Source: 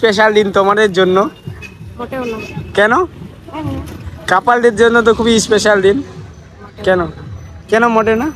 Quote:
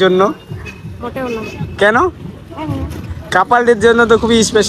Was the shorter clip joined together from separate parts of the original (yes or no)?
no